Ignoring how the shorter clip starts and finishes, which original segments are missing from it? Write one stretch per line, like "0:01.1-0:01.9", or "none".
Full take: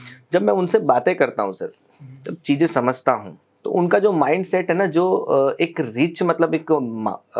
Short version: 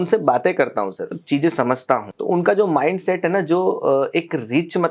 0:01.7-0:02.3
0:03.3-0:03.6